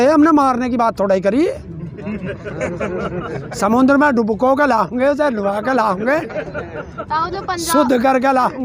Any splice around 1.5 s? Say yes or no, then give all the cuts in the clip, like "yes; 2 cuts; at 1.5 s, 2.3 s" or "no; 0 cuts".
no; 0 cuts